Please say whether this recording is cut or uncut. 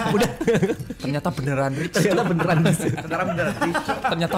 cut